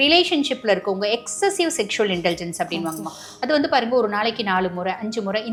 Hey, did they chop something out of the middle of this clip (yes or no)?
no